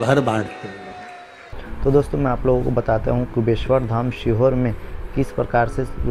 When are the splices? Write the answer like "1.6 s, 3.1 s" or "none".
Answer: 1.6 s